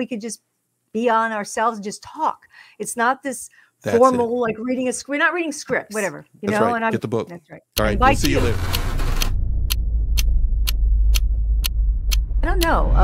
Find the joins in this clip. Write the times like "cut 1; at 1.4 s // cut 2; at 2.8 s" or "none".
cut 1; at 6.9 s